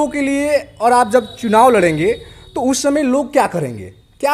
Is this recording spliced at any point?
no; 0 cuts

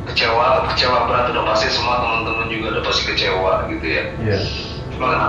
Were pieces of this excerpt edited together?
no; 0 cuts

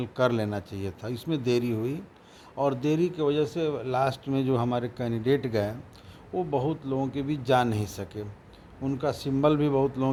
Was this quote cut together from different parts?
no; 0 cuts

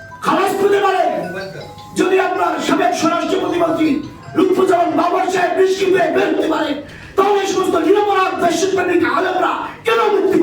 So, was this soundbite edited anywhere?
no; 0 cuts

